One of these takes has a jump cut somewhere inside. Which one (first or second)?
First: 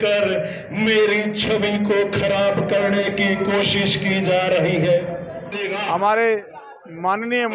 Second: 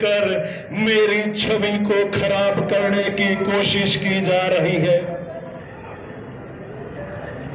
first